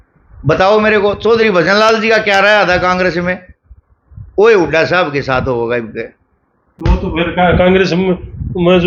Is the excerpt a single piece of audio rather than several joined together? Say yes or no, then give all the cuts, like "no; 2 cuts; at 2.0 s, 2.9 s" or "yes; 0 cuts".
yes; 0 cuts